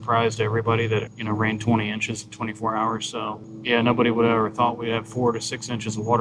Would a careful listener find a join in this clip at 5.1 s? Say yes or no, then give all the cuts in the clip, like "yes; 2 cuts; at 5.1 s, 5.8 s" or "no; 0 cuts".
no; 2 cuts; at 1.1 s, 3.5 s